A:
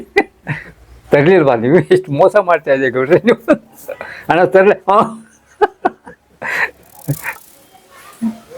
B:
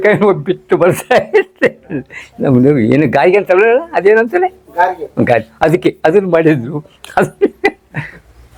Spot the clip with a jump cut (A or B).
A